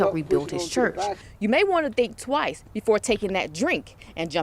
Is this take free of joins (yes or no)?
no